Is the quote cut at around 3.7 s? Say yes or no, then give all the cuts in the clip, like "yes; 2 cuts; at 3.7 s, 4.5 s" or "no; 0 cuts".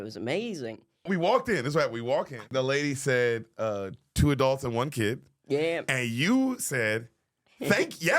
no; 2 cuts; at 1.1 s, 2.5 s